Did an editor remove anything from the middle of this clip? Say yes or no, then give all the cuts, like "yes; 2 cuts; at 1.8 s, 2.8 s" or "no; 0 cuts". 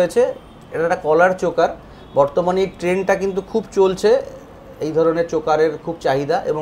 no; 0 cuts